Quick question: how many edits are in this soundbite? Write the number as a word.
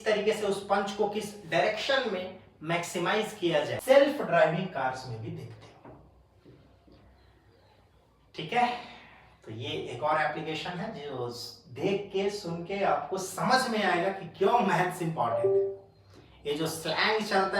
one